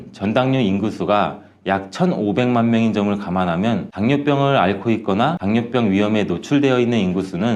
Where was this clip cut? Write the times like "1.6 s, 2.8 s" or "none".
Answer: none